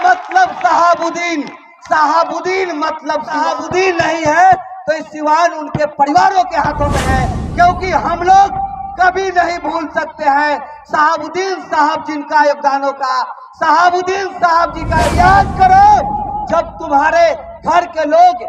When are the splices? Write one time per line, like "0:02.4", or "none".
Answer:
0:03.4
0:15.1